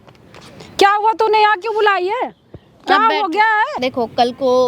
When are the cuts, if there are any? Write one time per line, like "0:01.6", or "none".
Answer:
0:03.7

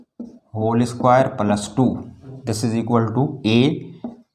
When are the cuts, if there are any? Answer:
0:02.4

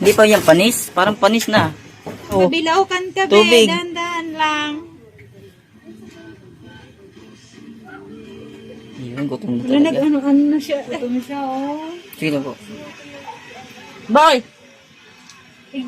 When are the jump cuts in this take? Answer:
0:02.4
0:10.9

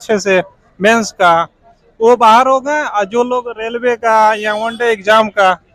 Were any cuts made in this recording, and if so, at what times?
none

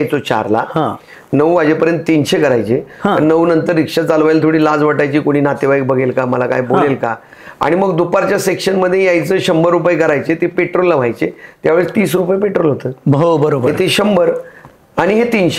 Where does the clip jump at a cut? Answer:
none

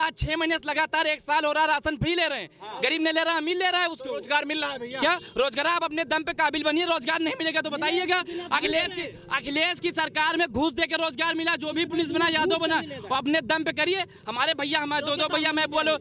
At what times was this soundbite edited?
none

